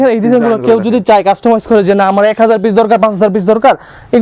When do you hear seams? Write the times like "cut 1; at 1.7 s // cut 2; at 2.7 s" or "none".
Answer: none